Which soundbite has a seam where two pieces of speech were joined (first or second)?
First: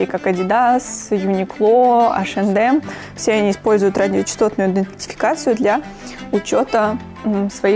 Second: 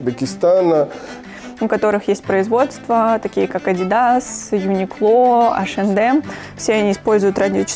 second